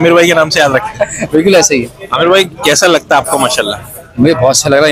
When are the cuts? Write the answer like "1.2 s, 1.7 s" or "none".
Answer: none